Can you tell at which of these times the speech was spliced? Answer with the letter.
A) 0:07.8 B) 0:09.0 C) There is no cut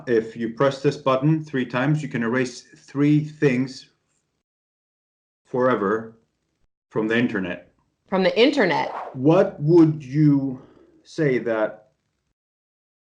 B